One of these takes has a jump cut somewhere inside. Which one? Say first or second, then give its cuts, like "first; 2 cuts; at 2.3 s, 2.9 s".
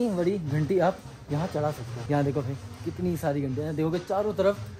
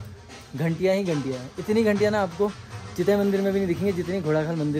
first; 1 cut; at 1.9 s